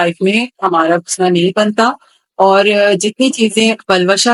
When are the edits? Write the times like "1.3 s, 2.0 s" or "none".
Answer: none